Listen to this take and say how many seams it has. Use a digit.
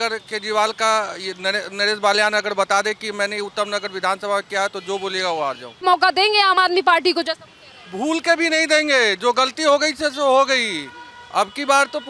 1